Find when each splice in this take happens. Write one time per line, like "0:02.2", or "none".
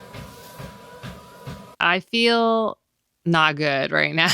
0:01.6